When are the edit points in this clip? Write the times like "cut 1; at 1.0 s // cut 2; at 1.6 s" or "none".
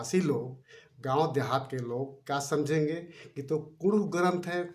none